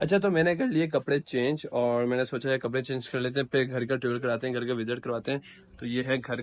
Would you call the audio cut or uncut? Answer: uncut